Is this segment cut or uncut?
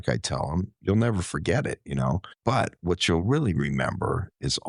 cut